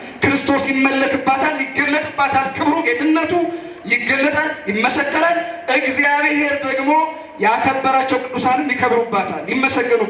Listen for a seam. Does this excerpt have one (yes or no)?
no